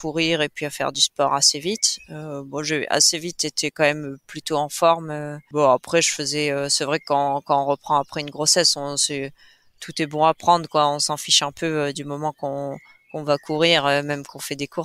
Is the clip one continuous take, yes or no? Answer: yes